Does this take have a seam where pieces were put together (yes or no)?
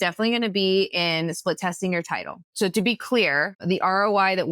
yes